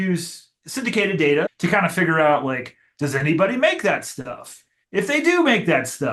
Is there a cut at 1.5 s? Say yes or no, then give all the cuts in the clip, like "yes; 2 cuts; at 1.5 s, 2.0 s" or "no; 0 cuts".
yes; 1 cut; at 1.5 s